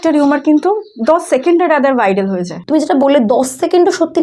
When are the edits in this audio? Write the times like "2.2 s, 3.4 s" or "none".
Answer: 2.6 s